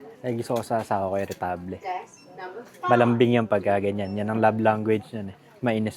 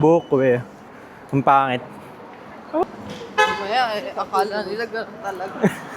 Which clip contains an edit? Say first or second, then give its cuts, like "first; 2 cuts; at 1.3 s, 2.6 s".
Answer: second; 1 cut; at 2.8 s